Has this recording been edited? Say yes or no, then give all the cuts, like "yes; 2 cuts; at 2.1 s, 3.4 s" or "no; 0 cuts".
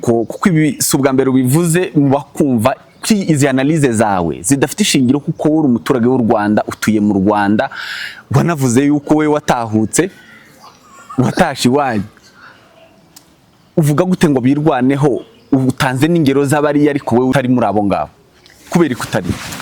yes; 1 cut; at 17.3 s